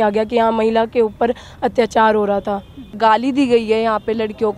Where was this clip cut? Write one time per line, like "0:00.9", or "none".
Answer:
0:02.9